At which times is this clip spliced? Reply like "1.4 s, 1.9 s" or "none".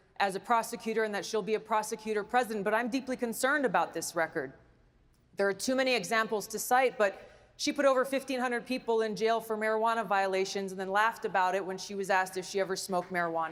none